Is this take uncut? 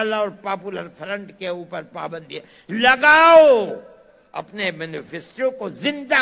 yes; 0 cuts

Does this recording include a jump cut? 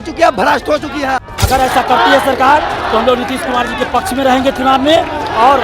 yes; 1 cut; at 1.3 s

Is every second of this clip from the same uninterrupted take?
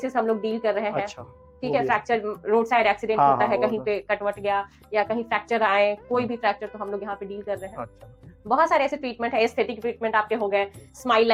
yes; 0 cuts

